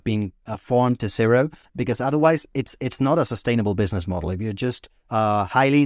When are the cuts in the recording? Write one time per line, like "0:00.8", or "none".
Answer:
0:01.6